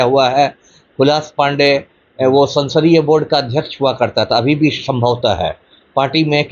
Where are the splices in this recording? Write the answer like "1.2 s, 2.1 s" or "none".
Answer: none